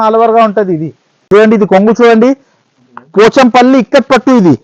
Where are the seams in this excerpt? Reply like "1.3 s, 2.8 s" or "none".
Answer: 1.3 s